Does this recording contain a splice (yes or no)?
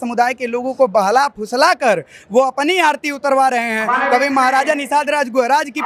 no